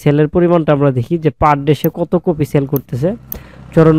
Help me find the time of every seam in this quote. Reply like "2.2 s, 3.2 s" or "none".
none